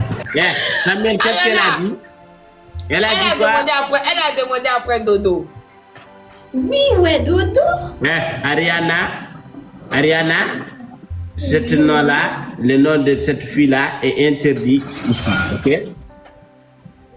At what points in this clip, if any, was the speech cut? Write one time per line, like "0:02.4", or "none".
none